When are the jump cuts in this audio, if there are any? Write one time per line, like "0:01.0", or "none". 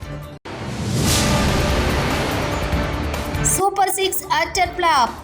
0:03.3